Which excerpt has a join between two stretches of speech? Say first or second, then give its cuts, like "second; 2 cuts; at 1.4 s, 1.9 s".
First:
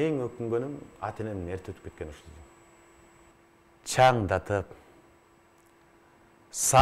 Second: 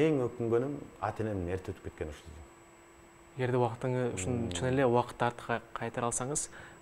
first; 1 cut; at 3.3 s